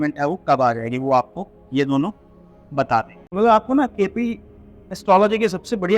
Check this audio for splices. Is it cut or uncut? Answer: cut